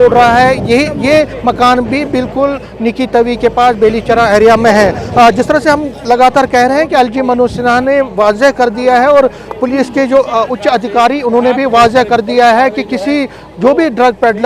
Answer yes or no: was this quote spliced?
no